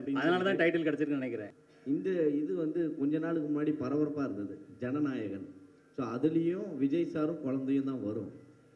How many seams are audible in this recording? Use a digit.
1